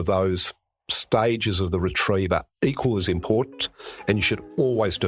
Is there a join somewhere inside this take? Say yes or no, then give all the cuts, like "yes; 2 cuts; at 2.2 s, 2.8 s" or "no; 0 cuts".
no; 0 cuts